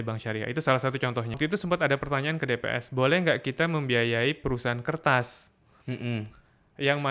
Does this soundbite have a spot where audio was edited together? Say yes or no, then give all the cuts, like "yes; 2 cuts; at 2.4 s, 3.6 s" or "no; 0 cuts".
yes; 1 cut; at 1.4 s